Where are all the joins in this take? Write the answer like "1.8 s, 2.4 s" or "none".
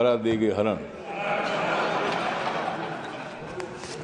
none